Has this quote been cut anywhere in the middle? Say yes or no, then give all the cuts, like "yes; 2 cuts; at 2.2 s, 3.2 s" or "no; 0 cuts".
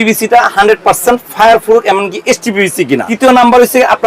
yes; 1 cut; at 3.1 s